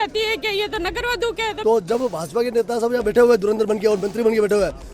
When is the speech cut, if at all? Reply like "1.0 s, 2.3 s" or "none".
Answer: 1.6 s